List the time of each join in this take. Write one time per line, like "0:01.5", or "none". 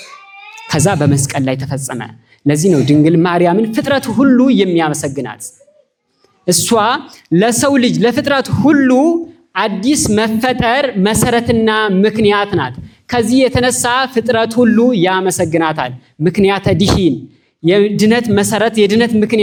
none